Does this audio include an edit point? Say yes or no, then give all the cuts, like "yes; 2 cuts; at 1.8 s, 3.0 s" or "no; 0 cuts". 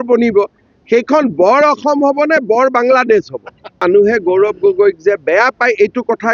yes; 1 cut; at 3.8 s